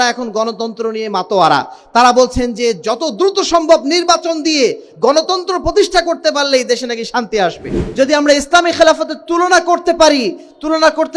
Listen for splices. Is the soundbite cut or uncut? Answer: cut